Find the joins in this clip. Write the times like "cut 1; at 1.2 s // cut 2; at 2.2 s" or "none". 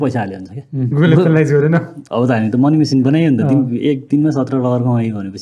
cut 1; at 0.9 s // cut 2; at 2.0 s